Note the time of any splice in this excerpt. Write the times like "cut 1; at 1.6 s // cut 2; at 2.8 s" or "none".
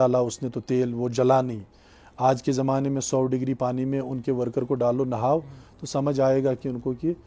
none